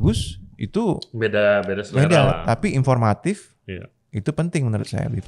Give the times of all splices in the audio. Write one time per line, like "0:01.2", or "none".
none